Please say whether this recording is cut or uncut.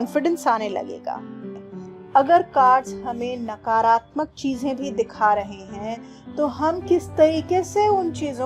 cut